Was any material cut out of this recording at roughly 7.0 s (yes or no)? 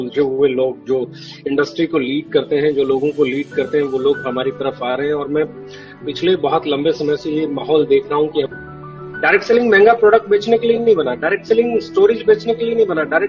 no